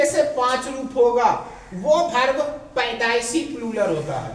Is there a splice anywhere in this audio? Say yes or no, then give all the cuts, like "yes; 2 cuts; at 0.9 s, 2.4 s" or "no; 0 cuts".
no; 0 cuts